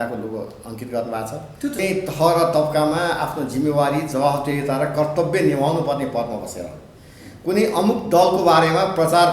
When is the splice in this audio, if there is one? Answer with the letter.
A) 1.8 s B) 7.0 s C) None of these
A